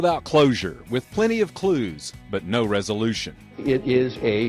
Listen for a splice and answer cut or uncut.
cut